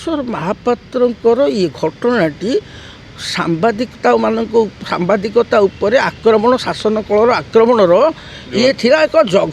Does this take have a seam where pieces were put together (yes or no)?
no